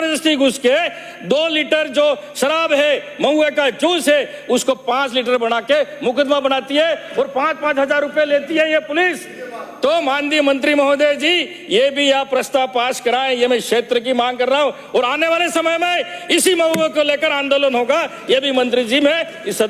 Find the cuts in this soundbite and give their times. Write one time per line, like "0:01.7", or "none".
none

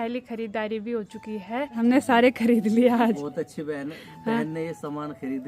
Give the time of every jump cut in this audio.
0:01.8

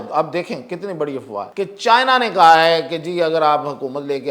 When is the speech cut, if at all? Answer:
0:01.5

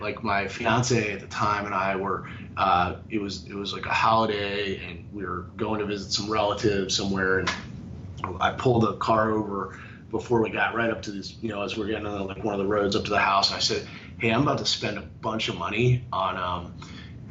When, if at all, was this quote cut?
none

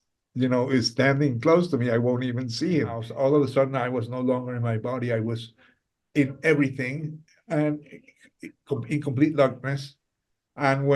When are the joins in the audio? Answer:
0:03.0

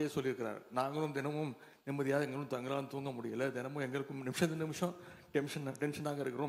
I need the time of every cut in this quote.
none

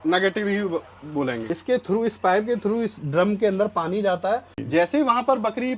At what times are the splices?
0:01.5
0:04.5

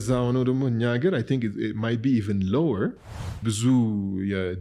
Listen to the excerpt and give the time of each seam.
0:03.4

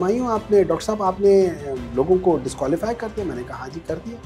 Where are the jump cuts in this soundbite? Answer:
none

